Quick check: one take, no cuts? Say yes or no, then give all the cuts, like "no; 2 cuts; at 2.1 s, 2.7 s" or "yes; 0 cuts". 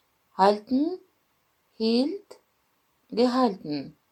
yes; 0 cuts